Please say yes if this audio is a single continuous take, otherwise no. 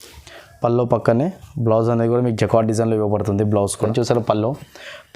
no